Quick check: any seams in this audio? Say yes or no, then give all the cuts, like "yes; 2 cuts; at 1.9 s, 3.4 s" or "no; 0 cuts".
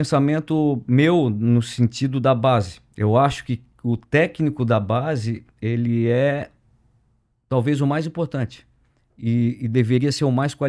no; 0 cuts